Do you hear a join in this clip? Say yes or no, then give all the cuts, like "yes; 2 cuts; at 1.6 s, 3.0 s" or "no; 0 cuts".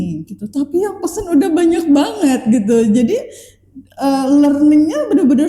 no; 0 cuts